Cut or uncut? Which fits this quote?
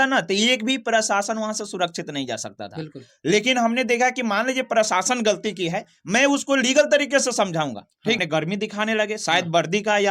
cut